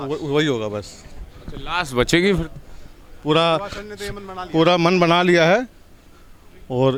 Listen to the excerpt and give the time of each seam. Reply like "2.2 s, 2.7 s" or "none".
none

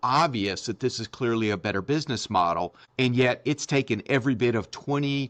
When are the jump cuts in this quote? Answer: 2.8 s

